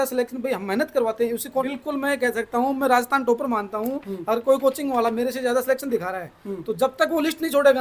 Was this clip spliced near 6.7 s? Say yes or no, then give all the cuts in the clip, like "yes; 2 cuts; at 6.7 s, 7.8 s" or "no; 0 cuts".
no; 1 cut; at 1.6 s